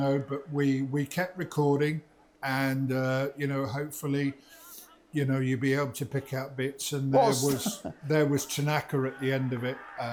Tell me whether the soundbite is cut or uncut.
uncut